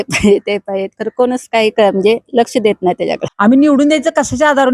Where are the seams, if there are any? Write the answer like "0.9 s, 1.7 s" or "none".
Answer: 3.3 s